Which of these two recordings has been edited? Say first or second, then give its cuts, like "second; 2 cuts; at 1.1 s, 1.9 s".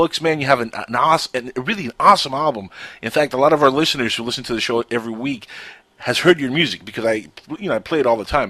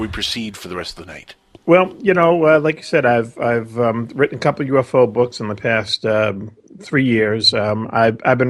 second; 1 cut; at 4.8 s